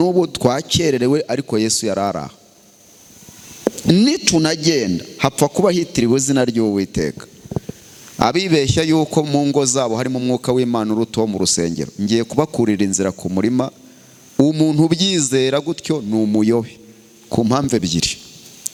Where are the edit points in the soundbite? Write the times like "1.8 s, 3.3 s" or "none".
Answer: none